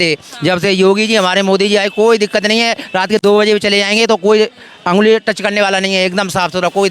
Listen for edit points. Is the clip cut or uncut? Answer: uncut